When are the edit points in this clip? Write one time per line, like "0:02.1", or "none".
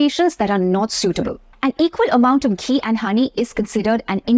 0:01.4